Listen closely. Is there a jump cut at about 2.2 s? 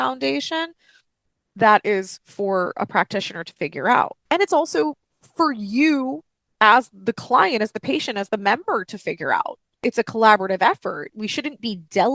no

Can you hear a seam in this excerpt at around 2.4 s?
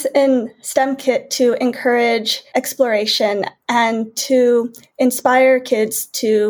yes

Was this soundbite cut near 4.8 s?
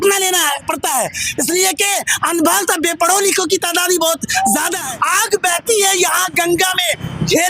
yes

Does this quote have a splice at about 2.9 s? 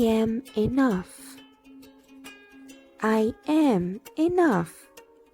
yes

